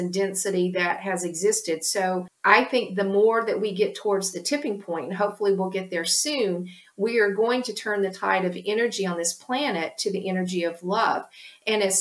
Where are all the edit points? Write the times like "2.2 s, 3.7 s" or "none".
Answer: 2.3 s